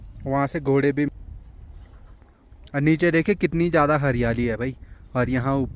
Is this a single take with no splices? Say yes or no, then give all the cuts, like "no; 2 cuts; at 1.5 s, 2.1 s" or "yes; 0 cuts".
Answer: no; 1 cut; at 1.1 s